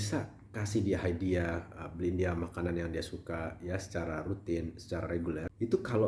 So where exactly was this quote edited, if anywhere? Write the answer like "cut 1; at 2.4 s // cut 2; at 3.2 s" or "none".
none

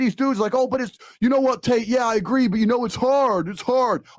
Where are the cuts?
none

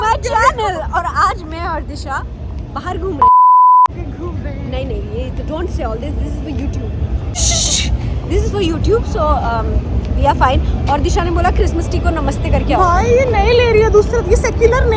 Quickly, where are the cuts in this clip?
none

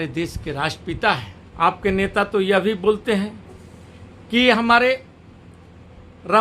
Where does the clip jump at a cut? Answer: cut 1; at 1.4 s

